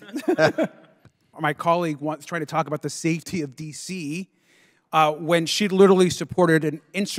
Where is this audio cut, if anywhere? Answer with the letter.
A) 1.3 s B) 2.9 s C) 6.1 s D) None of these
A